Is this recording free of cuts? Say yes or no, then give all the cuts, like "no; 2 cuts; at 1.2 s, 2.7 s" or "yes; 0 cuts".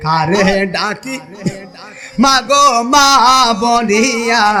yes; 0 cuts